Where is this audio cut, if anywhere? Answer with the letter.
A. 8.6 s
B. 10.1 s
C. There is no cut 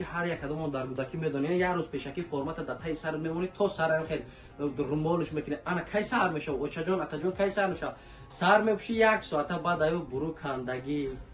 C